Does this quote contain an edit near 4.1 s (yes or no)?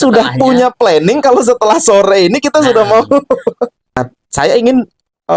yes